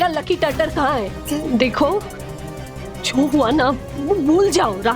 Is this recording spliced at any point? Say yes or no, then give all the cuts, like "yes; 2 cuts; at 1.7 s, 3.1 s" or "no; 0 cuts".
yes; 1 cut; at 1.2 s